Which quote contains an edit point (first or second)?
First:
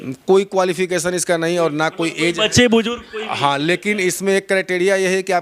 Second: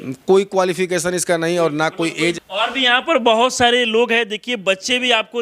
second